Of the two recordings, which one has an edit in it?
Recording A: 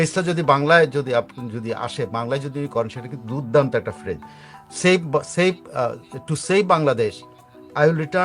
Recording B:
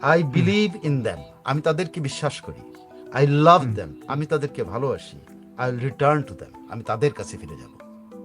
B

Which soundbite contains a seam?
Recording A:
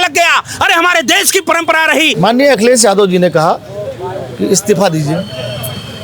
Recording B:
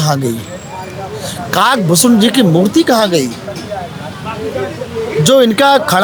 A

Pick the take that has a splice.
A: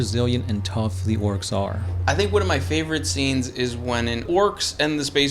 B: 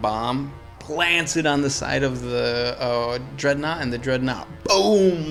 A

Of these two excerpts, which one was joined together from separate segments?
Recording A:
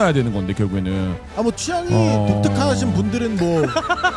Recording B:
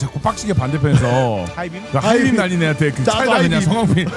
A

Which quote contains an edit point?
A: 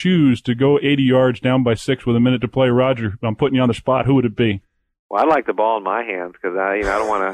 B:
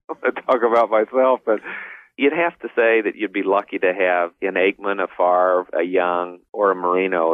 B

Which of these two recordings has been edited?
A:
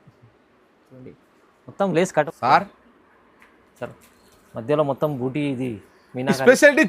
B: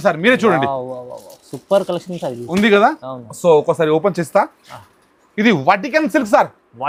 A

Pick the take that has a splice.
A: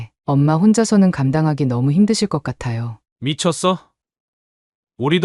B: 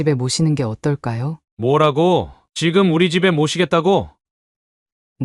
B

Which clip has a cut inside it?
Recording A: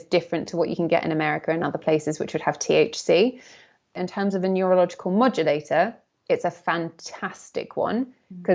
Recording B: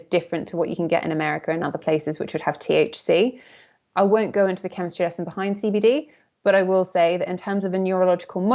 A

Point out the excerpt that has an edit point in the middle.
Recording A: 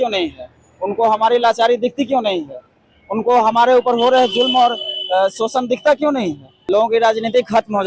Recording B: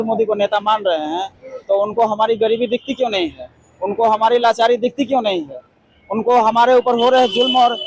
A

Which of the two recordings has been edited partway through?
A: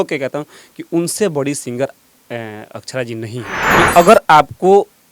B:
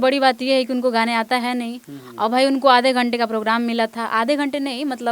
A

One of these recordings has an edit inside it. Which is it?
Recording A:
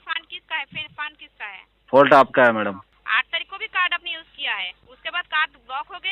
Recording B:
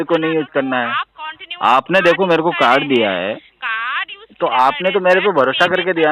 A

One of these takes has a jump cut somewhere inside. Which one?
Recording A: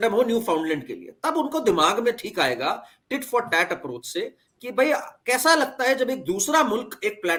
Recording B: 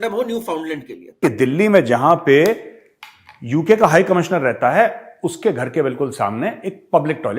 B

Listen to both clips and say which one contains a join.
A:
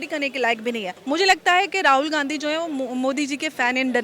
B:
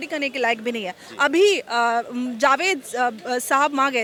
A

